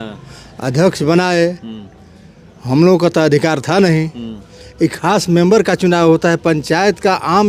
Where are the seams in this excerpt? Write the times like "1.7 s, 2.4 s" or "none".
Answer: none